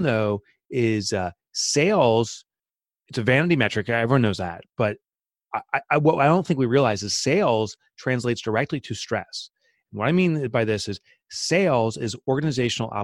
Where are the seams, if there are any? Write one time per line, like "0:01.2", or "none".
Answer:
none